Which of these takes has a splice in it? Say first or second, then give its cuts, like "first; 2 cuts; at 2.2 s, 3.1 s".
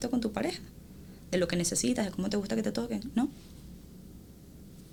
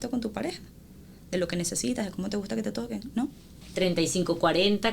second; 1 cut; at 3.6 s